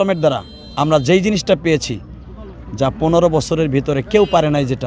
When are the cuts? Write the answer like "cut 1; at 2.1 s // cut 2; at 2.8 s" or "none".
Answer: none